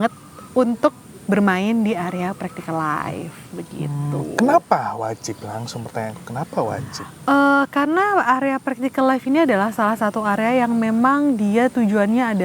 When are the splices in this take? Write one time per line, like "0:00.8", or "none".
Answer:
none

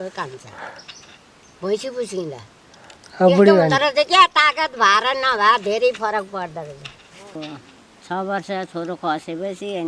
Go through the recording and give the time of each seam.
0:07.4

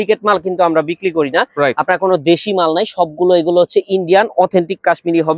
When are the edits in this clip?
none

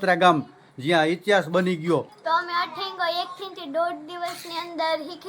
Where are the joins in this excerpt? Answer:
0:02.1

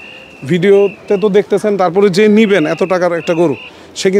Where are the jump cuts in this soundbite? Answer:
none

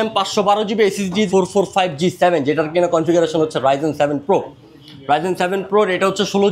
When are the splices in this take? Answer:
0:01.3

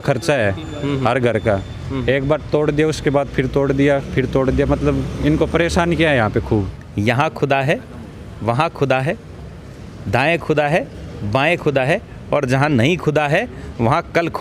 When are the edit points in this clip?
0:06.8

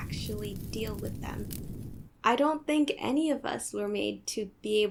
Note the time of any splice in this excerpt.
none

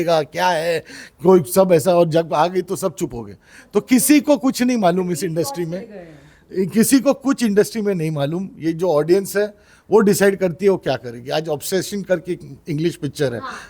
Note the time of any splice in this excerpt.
none

